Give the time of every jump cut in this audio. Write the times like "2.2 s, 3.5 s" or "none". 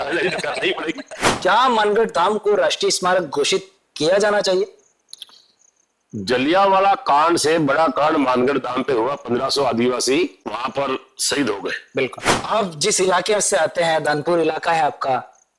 1.3 s, 12.3 s

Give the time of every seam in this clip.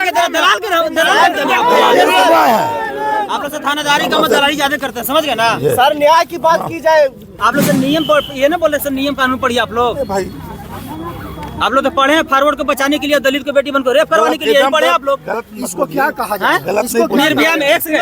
7.3 s

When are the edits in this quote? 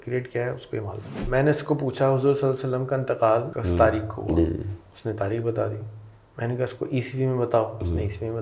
1.2 s, 3.5 s

